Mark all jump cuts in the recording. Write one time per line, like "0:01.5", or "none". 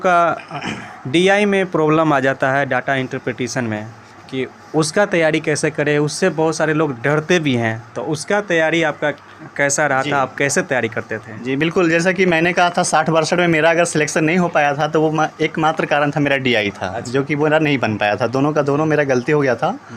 none

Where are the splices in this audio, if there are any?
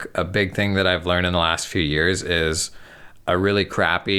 none

